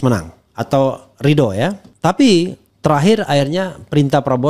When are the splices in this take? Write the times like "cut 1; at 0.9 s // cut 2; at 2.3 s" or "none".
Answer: cut 1; at 1.9 s // cut 2; at 2.6 s